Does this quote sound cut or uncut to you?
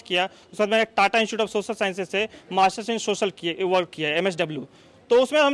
uncut